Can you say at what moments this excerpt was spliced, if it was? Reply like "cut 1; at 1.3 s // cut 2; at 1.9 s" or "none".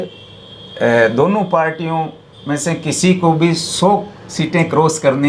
none